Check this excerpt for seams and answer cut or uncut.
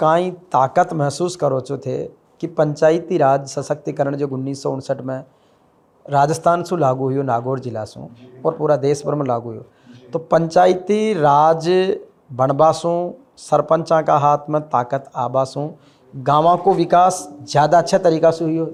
uncut